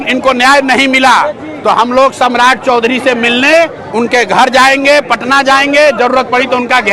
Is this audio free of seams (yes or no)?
yes